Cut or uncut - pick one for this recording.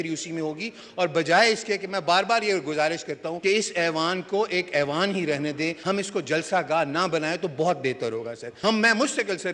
cut